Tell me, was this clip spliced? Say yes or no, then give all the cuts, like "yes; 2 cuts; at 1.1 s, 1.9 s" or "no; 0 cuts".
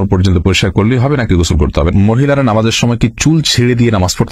yes; 1 cut; at 1.9 s